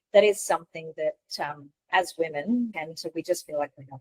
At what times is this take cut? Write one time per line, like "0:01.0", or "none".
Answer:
0:02.8